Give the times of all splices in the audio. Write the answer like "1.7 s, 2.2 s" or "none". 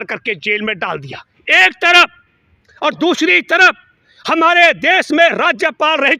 none